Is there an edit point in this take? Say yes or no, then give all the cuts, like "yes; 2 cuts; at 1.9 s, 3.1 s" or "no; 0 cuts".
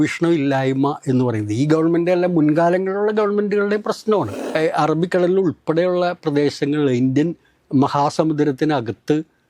yes; 1 cut; at 4.4 s